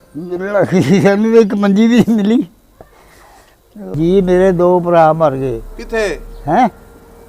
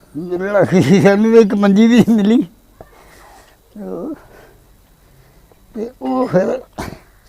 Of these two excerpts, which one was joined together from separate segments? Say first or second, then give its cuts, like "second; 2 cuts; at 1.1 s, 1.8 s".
first; 1 cut; at 3.9 s